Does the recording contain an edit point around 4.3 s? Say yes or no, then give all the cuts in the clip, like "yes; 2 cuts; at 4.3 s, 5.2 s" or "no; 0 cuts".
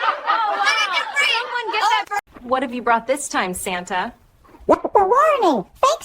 no; 1 cut; at 2.3 s